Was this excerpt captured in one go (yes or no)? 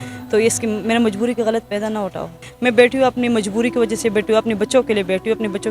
no